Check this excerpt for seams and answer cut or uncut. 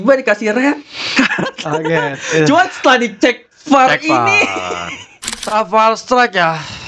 cut